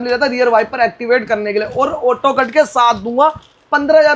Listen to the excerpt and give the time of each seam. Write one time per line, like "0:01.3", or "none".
none